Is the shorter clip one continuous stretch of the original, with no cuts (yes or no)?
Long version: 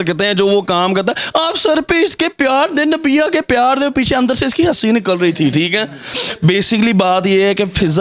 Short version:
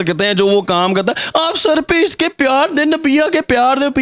yes